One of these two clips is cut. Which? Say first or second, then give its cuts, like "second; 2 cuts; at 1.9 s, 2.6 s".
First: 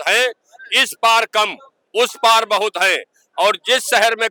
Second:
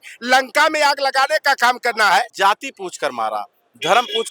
second; 1 cut; at 2.0 s